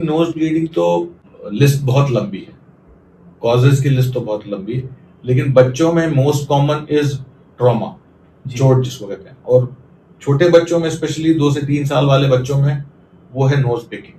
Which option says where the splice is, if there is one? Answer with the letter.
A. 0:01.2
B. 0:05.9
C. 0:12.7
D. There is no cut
A